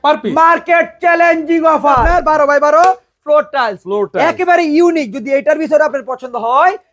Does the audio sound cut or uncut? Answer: cut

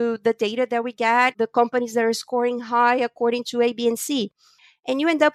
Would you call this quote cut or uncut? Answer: uncut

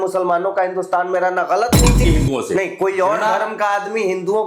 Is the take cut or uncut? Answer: cut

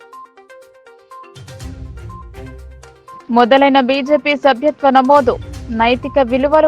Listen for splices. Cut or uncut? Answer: cut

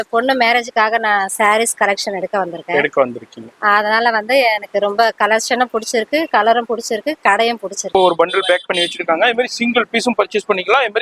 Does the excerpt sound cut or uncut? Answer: cut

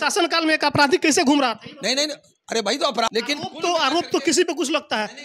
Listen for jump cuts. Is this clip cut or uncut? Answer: cut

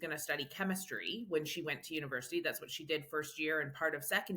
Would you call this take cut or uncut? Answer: uncut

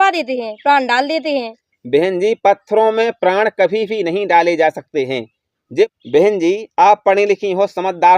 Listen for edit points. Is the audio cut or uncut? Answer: cut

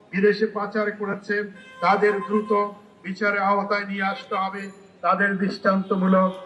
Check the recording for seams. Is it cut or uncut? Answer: uncut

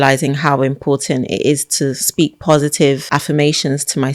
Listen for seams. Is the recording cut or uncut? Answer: cut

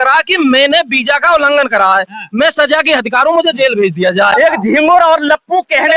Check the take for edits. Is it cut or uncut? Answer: cut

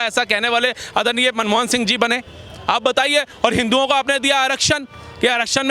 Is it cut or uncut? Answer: uncut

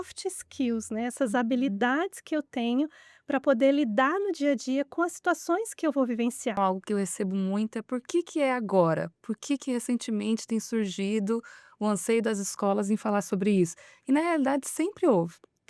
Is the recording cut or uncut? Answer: cut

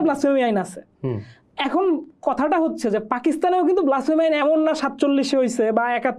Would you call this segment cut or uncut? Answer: uncut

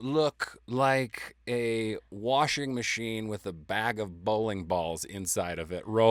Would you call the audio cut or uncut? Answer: uncut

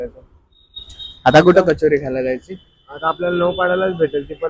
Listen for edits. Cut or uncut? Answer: uncut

